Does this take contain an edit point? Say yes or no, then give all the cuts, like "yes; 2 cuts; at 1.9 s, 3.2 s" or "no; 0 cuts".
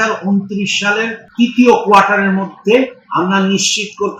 yes; 1 cut; at 1.2 s